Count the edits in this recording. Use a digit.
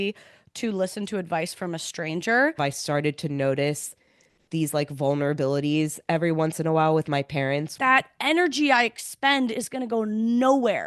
2